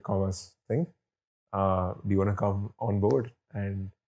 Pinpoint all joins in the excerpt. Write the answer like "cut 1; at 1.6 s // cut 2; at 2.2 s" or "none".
none